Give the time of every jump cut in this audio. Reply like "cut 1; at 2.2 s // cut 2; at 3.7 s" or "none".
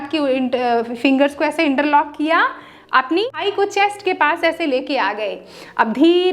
cut 1; at 3.4 s